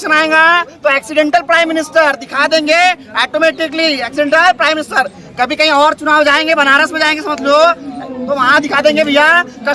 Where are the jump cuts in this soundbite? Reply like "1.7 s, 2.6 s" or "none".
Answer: none